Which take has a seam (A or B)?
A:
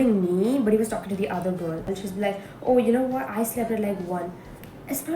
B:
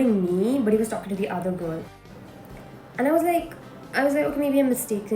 A